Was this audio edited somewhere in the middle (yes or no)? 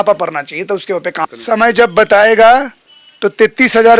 yes